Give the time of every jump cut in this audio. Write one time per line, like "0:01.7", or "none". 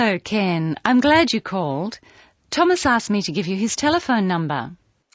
none